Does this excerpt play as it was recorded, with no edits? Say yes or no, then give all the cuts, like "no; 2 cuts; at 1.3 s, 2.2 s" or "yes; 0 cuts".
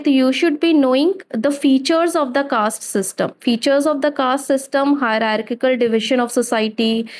yes; 0 cuts